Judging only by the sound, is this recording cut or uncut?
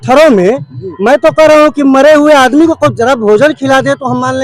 uncut